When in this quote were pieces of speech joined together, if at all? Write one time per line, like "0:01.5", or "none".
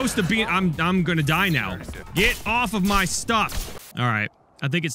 0:02.0
0:03.6